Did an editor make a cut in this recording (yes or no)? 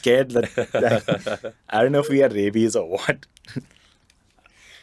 no